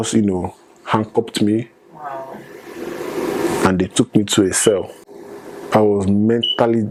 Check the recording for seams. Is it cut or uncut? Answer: uncut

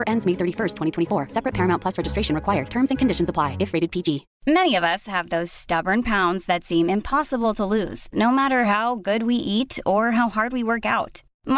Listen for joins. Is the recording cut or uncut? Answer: cut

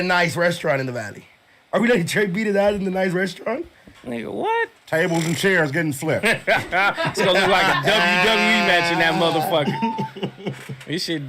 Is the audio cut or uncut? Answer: cut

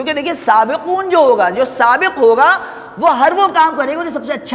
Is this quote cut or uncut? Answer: uncut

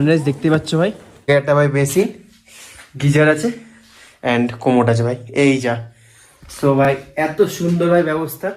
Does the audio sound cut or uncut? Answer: cut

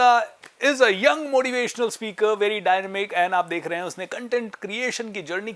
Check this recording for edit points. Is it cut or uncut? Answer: uncut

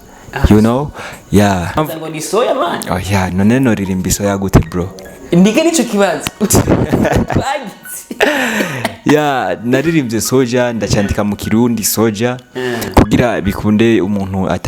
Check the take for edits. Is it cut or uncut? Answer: cut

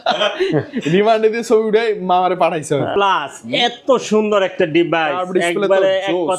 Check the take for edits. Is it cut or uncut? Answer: cut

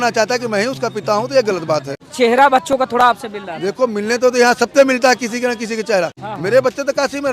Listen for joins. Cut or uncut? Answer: cut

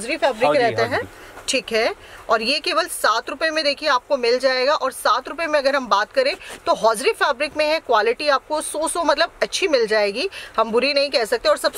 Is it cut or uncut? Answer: uncut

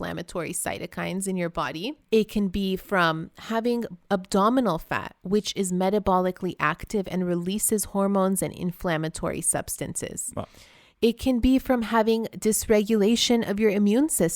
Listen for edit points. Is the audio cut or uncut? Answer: cut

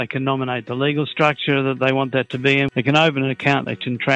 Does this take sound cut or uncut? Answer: cut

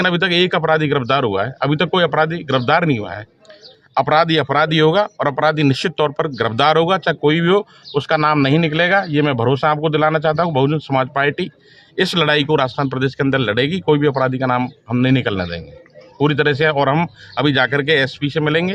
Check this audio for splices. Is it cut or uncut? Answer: cut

